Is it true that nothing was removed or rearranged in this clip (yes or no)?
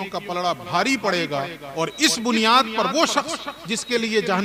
yes